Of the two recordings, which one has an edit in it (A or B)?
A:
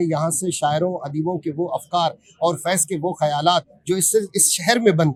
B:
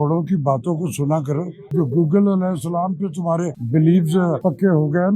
B